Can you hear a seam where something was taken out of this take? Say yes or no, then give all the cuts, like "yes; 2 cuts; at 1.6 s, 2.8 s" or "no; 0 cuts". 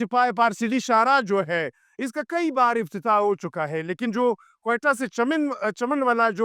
no; 0 cuts